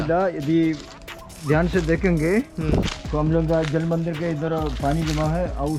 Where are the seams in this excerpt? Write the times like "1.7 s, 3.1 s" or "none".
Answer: none